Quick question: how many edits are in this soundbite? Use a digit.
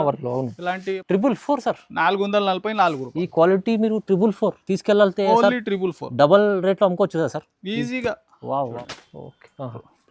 2